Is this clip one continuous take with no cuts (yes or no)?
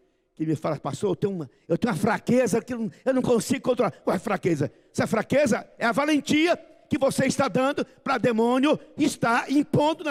yes